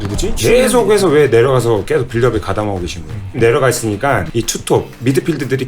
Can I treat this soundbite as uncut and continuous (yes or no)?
no